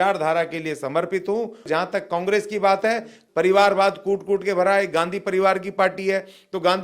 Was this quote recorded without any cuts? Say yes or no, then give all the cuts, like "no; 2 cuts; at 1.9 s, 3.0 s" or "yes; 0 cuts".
no; 2 cuts; at 1.6 s, 3.2 s